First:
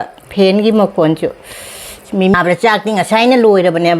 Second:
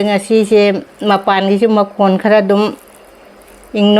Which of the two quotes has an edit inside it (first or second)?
first